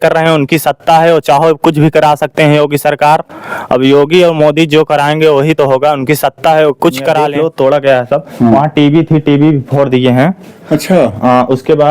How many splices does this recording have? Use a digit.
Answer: 1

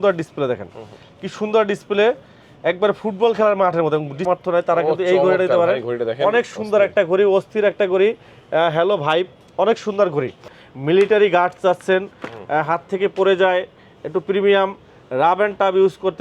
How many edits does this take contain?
2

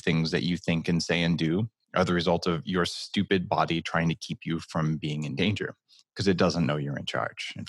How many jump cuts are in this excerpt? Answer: 0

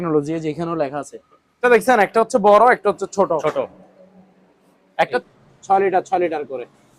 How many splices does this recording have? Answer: 2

